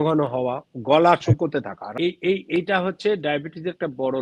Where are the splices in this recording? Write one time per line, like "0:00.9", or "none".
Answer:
0:01.9